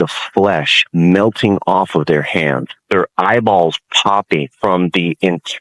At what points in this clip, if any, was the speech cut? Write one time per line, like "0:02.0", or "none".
0:02.7
0:04.5